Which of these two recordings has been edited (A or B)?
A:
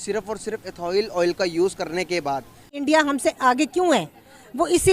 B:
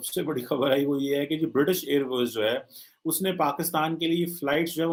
A